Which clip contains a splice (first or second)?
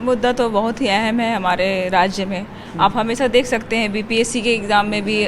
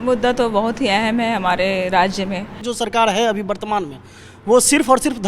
second